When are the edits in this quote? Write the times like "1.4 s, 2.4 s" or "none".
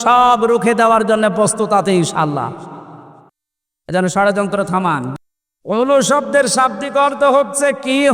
5.1 s

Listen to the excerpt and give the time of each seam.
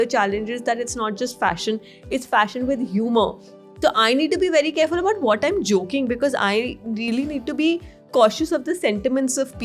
none

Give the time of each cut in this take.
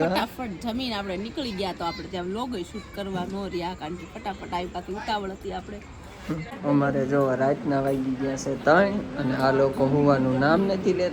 6.5 s

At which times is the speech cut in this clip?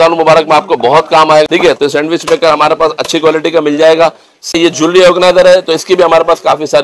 1.5 s, 4.5 s

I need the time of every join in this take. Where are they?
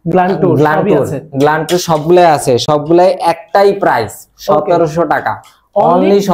none

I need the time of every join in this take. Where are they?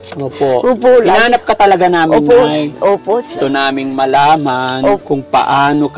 3.3 s, 5.0 s

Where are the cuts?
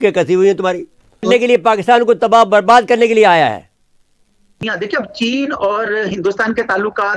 4.4 s

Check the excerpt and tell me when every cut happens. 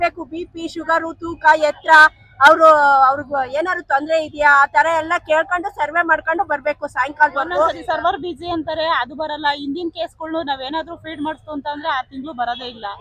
7.8 s

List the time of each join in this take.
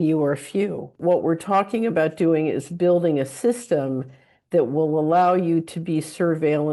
1.0 s

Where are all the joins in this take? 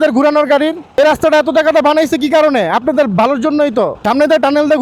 1.0 s, 4.0 s

